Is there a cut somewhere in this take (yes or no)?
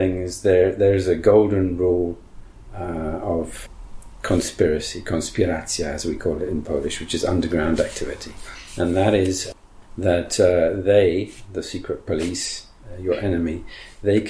yes